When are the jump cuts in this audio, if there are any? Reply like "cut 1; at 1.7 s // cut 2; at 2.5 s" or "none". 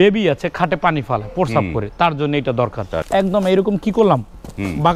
cut 1; at 2.9 s